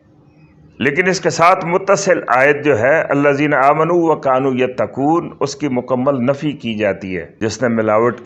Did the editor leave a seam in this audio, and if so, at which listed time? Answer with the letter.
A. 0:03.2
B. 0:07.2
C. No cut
B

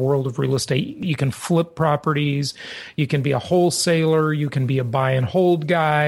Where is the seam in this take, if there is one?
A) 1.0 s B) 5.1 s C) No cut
A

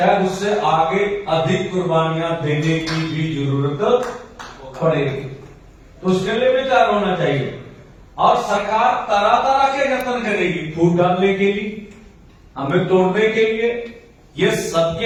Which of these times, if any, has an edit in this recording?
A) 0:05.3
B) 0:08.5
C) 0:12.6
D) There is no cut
D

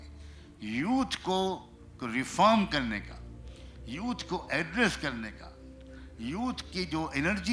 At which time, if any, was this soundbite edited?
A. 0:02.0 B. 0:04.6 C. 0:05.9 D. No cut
D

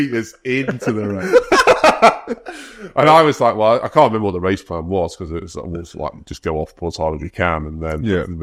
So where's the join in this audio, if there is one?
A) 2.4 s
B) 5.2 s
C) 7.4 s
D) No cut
D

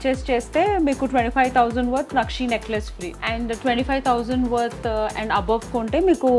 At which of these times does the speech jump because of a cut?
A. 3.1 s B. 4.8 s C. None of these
A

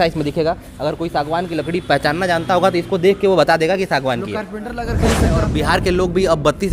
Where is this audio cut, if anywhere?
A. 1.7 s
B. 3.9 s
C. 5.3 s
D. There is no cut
C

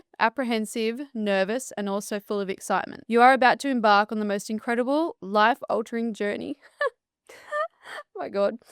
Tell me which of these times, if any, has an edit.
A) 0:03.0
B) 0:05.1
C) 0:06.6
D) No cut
A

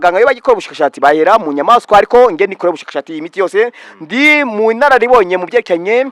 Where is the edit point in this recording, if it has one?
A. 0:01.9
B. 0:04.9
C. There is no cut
C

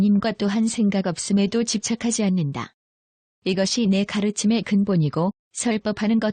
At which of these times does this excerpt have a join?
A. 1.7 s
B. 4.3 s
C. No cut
A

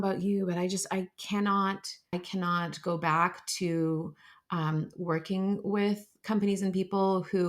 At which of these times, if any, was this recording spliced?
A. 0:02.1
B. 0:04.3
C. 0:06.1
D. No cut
A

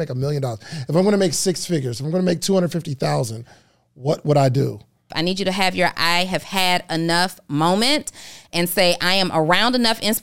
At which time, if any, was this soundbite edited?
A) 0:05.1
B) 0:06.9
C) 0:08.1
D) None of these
A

